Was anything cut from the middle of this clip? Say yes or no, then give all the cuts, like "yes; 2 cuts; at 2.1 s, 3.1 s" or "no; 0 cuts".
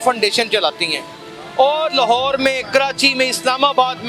no; 0 cuts